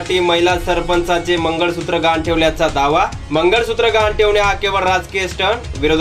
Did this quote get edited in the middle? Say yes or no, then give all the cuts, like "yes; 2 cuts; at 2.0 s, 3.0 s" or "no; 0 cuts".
no; 0 cuts